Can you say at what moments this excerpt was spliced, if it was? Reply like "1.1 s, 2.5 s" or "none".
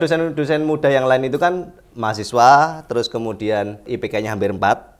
3.9 s